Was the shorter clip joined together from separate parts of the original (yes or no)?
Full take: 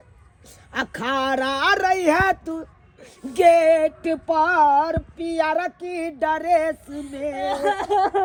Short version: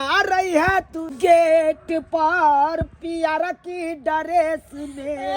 yes